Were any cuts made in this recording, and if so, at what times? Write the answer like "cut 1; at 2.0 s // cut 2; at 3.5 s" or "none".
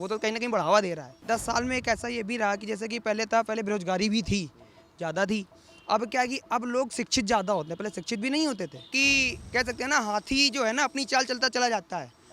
cut 1; at 1.2 s // cut 2; at 8.9 s